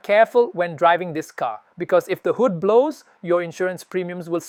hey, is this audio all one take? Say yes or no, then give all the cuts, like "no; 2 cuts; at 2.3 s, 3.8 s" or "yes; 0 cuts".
yes; 0 cuts